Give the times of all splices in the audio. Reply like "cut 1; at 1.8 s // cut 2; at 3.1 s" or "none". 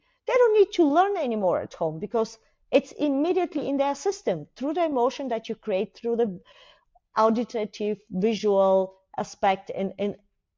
none